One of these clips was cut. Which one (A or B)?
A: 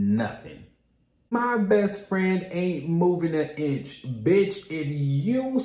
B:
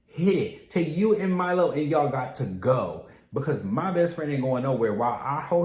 A